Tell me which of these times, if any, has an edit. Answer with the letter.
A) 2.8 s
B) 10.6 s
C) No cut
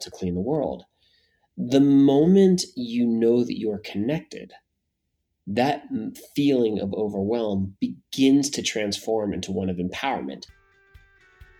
B